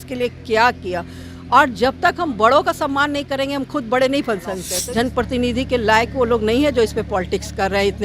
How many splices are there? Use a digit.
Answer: 1